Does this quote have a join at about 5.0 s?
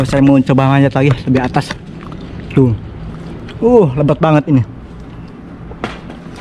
no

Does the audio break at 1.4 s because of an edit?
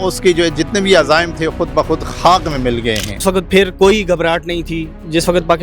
no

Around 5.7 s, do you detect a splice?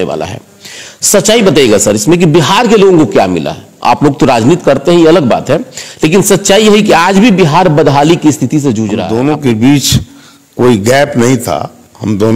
no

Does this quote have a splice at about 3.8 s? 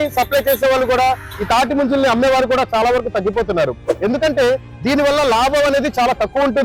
no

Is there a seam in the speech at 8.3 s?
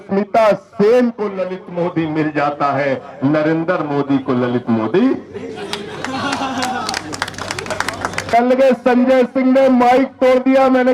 yes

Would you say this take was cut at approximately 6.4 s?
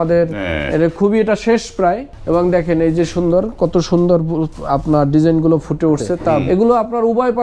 yes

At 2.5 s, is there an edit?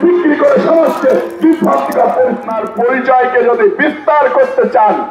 yes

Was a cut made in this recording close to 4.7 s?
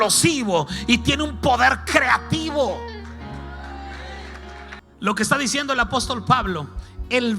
yes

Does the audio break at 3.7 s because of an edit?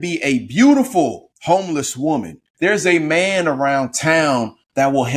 no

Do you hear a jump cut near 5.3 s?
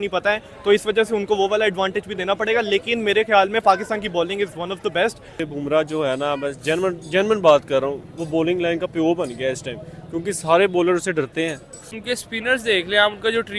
yes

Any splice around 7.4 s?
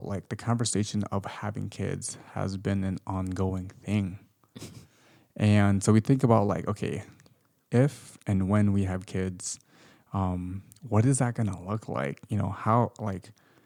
no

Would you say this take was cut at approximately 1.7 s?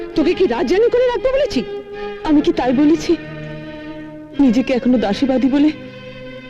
no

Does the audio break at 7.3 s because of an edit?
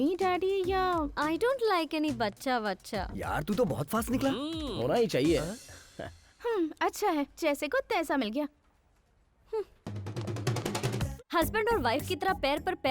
no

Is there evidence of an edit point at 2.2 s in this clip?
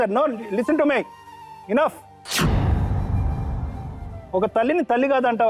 yes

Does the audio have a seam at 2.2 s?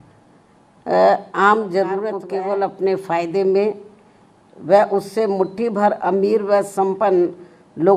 yes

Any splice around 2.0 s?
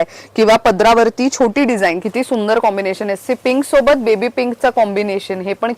yes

